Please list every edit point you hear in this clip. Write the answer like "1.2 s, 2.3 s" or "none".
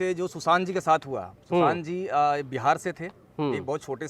none